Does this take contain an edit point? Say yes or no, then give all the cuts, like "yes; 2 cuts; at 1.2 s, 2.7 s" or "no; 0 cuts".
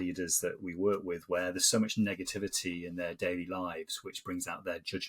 no; 0 cuts